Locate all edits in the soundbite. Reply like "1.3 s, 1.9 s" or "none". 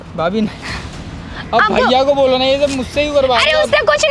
none